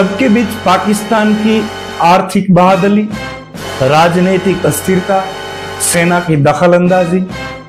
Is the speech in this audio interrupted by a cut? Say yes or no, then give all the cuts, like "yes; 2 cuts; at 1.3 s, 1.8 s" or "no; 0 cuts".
no; 0 cuts